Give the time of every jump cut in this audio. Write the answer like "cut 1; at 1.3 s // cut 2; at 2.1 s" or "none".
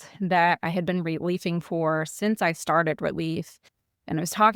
none